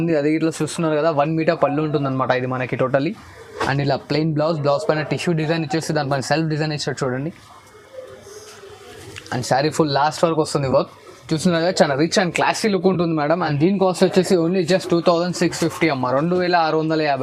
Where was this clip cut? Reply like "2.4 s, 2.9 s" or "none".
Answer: none